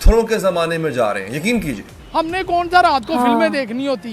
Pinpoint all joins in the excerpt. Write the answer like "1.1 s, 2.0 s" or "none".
1.9 s

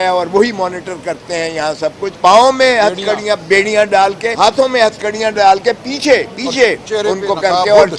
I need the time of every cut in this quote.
2.1 s, 4.3 s

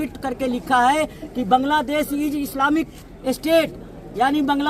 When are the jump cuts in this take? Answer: none

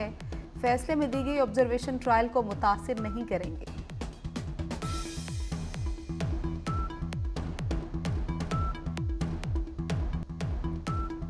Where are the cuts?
10.2 s

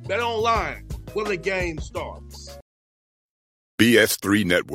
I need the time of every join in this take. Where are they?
2.5 s

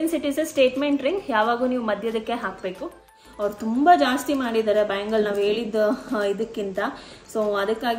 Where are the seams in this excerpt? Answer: 3.1 s

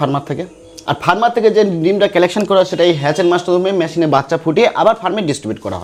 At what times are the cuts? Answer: none

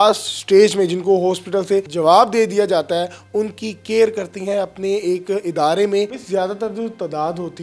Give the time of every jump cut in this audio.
1.9 s, 6.2 s

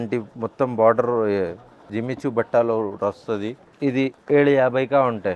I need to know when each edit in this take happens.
none

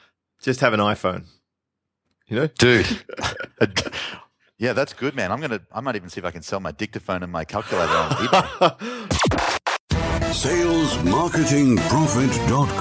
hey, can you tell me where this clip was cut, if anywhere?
9.0 s

